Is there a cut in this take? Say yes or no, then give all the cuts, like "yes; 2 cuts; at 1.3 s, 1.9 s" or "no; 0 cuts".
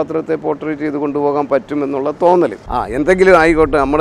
yes; 1 cut; at 2.6 s